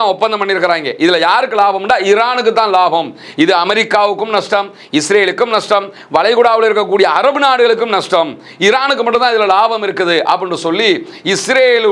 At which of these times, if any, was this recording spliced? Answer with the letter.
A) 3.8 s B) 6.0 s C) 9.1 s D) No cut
D